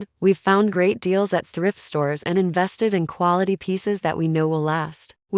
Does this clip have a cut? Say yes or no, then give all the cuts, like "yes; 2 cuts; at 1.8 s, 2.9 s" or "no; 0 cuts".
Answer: no; 0 cuts